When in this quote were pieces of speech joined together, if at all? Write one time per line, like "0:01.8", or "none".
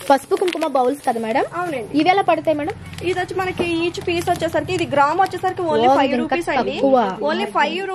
none